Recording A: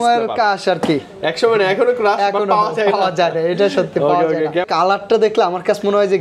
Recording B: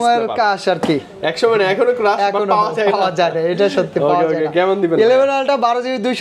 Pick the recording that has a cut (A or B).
A